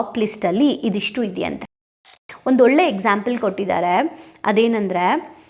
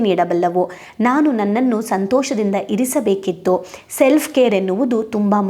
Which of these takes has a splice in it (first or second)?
first